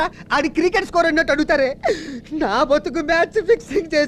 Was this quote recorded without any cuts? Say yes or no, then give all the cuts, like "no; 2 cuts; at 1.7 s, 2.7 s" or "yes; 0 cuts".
yes; 0 cuts